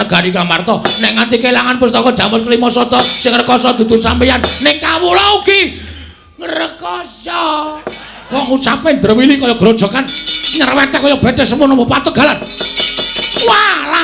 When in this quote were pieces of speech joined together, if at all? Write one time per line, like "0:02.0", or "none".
0:08.2